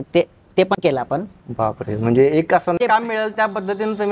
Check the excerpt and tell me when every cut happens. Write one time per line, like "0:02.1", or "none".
none